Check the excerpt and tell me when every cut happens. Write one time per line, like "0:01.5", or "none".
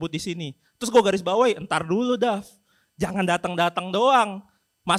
none